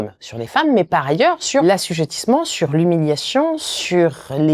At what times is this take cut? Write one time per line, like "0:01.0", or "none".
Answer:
0:01.6